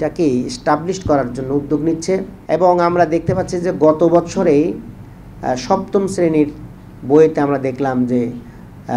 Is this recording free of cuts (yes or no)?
no